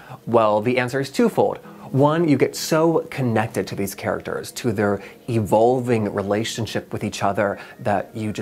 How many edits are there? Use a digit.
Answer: 1